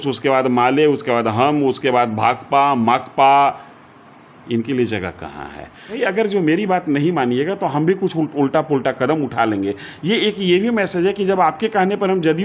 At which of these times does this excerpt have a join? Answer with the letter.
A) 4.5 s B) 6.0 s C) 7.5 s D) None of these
B